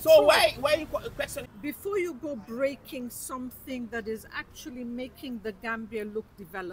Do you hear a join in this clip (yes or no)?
yes